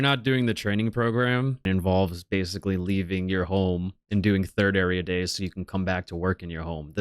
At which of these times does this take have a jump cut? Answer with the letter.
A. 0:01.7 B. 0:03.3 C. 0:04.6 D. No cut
A